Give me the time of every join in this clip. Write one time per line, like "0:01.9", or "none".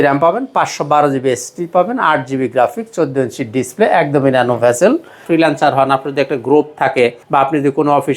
0:05.2
0:07.2